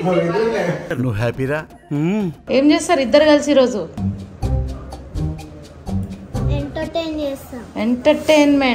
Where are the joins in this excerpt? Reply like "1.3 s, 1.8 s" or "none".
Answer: 2.4 s